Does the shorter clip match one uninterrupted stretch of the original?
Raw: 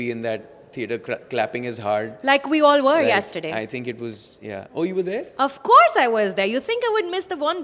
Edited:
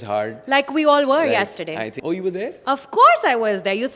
no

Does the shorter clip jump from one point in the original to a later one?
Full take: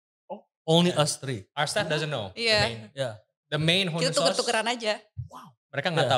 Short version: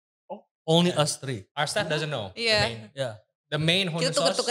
no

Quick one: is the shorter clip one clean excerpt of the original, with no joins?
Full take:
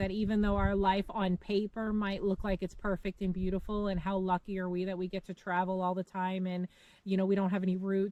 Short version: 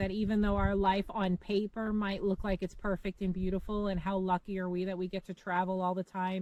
yes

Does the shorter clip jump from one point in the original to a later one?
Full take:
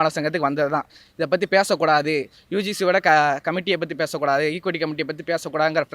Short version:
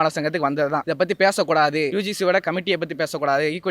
yes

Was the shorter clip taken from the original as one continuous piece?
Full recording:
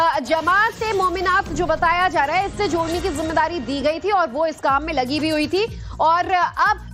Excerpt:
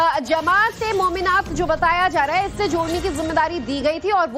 yes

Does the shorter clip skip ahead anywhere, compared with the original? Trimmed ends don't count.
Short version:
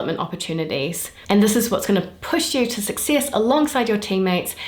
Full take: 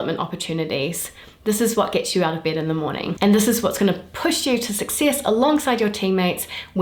yes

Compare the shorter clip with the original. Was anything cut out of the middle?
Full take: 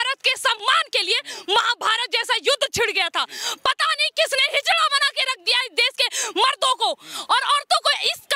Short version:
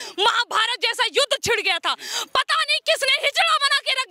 no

